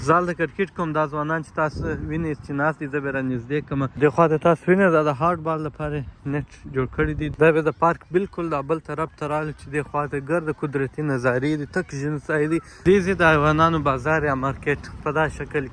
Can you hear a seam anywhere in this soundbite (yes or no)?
yes